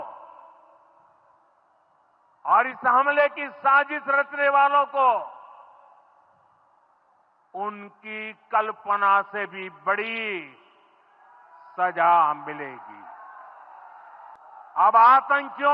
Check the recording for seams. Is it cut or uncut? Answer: cut